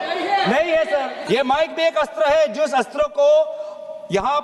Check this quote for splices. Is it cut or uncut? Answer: cut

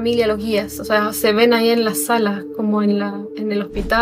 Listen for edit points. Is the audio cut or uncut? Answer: uncut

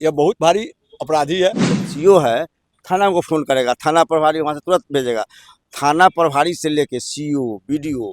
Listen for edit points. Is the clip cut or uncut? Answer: cut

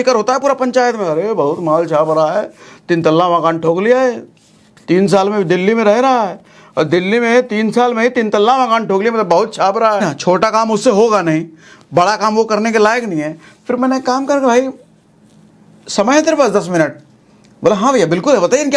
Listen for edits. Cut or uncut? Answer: cut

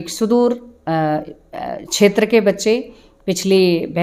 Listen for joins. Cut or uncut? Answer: uncut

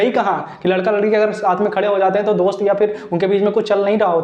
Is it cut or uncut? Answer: uncut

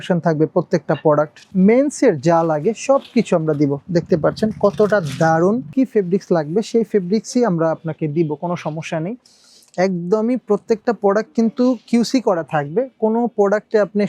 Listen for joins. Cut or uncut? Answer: cut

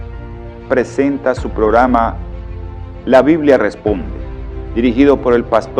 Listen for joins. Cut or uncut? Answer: cut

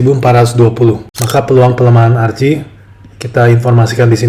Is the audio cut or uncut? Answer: cut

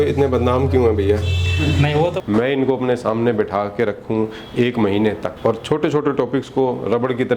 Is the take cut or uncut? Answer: cut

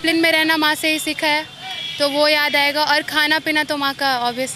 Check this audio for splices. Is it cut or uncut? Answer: uncut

